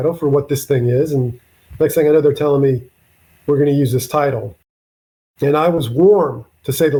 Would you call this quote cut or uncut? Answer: uncut